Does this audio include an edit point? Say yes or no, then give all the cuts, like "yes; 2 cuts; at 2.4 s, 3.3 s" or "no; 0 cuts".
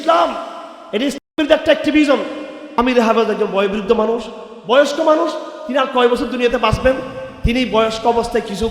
yes; 1 cut; at 2.6 s